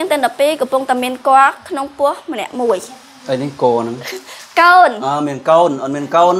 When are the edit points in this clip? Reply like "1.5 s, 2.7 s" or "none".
none